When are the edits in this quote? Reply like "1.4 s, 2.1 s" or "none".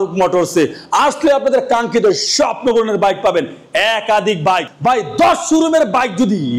none